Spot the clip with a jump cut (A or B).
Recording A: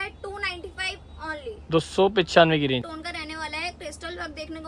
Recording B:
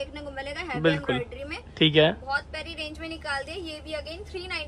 A